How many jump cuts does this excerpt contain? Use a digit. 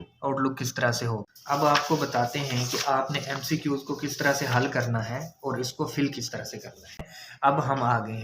2